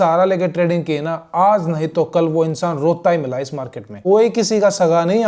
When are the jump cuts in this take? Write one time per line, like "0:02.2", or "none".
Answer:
0:03.9

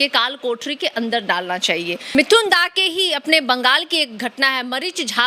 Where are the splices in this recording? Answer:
0:02.0

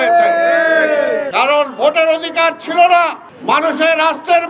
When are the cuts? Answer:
0:01.3
0:03.3

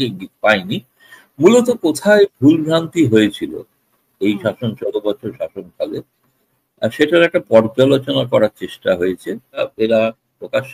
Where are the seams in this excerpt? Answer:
0:09.7

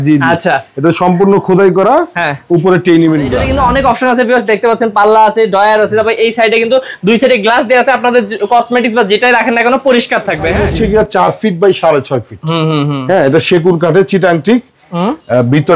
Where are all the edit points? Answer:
0:03.4
0:10.6

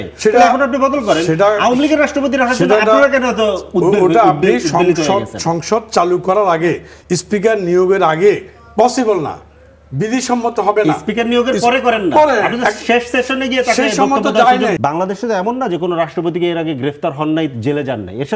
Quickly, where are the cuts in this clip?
0:14.8

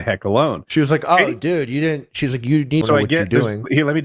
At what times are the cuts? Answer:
0:02.8

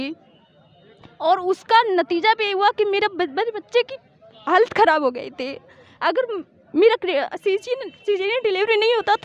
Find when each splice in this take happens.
none

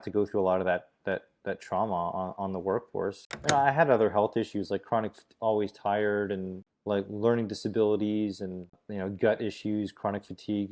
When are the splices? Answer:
0:03.3

